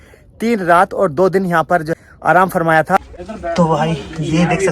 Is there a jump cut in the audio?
yes; 2 cuts; at 1.9 s, 3.1 s

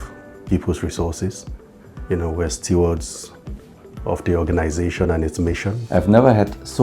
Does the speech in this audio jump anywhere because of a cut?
yes; 1 cut; at 5.7 s

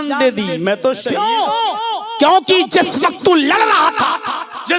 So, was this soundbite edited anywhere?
yes; 1 cut; at 1.1 s

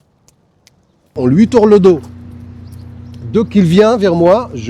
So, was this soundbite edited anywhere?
yes; 1 cut; at 1.1 s

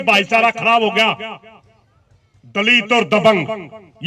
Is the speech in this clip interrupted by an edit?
no; 0 cuts

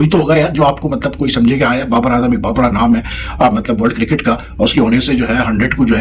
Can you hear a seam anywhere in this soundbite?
no; 0 cuts

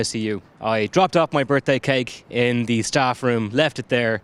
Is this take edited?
no; 0 cuts

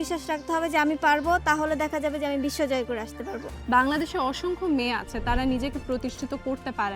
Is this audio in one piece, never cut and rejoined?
no; 1 cut; at 3.5 s

